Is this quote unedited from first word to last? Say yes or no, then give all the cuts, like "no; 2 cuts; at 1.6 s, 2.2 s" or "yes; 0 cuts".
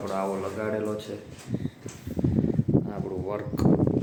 yes; 0 cuts